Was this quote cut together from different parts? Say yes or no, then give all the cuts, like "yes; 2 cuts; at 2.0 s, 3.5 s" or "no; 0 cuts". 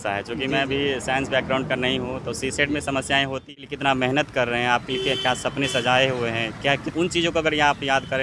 yes; 2 cuts; at 3.5 s, 6.9 s